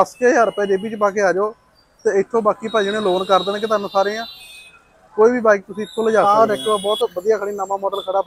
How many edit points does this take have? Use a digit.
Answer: 1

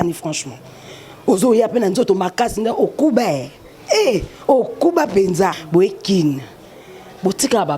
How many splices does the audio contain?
1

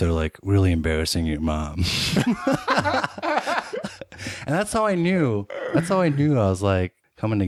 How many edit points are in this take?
0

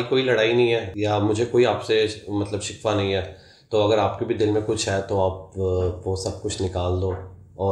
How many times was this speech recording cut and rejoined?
1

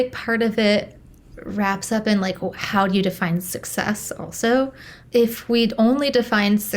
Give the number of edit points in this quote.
0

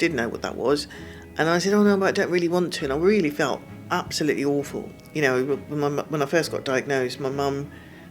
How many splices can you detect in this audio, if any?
1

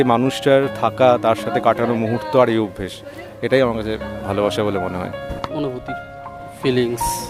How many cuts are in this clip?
0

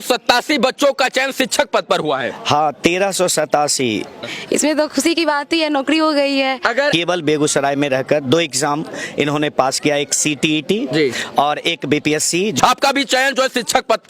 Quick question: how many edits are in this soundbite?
3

